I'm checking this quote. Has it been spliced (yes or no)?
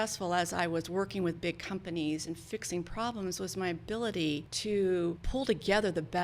yes